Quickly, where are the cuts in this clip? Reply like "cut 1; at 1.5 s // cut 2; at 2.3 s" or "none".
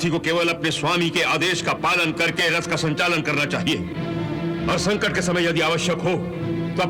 none